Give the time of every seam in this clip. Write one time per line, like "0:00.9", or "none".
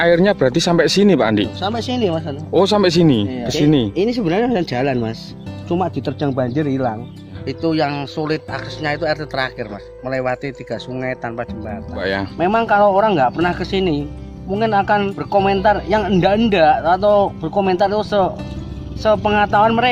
0:03.5
0:07.4
0:12.0
0:15.2